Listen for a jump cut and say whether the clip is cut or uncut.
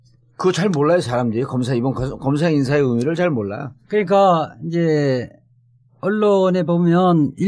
uncut